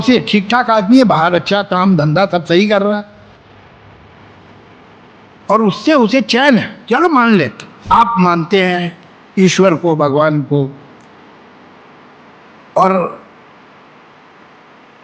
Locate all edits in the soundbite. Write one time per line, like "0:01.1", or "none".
0:07.7